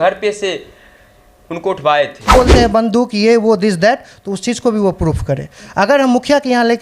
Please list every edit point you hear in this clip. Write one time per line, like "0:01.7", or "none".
0:02.3